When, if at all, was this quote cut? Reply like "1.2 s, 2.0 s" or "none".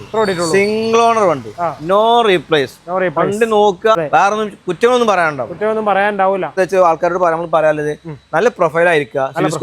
4.0 s, 6.5 s